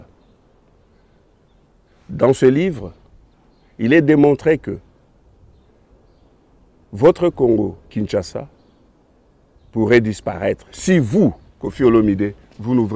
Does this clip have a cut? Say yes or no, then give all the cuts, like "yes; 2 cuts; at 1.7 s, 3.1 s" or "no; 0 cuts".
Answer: no; 0 cuts